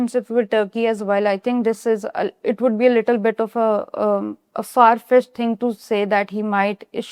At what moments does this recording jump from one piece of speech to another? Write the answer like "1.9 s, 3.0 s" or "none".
none